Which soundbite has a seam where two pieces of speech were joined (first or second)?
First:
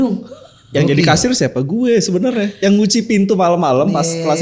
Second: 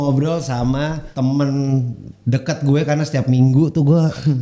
second